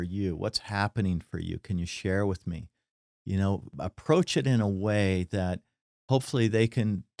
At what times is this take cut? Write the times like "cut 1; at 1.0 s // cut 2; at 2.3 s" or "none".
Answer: none